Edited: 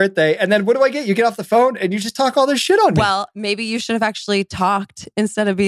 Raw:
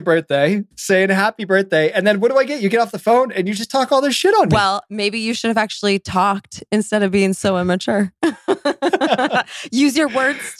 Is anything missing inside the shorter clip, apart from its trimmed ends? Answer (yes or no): no